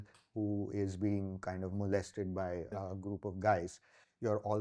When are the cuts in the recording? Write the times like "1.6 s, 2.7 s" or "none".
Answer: 2.7 s